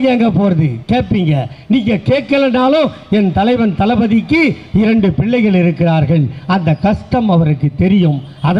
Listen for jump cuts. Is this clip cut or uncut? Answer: uncut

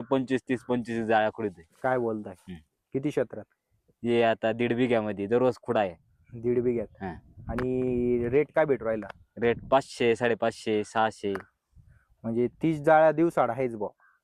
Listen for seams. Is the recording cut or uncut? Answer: uncut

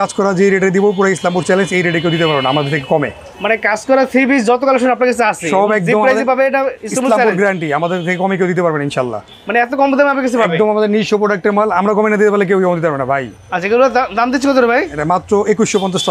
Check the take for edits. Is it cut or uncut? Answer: uncut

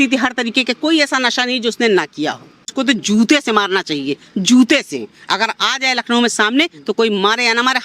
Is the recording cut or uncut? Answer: cut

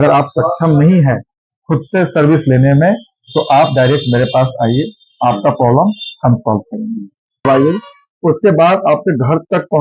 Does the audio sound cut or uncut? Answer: cut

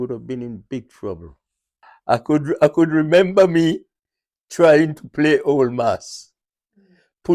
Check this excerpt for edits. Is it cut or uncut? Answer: cut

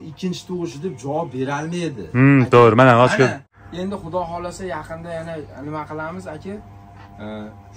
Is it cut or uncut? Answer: cut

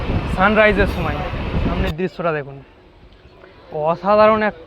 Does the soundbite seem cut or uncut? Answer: cut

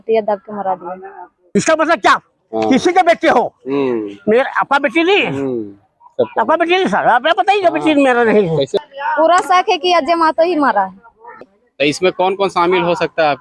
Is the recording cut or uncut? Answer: cut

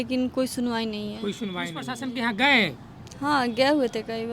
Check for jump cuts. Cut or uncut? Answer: cut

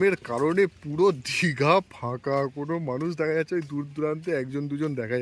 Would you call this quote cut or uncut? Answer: uncut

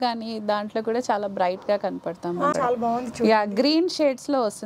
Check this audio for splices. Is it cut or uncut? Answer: cut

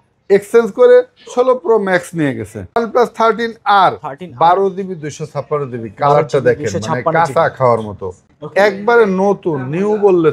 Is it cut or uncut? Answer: cut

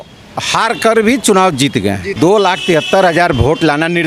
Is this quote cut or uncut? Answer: cut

